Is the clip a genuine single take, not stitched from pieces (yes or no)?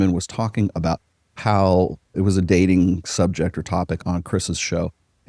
no